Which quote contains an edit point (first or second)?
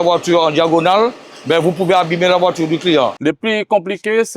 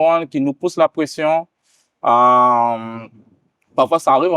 first